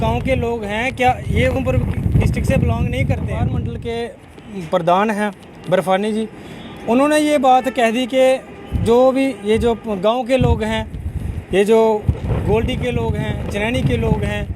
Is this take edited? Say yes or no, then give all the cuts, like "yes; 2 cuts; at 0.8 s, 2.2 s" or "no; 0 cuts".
yes; 2 cuts; at 1.6 s, 3.7 s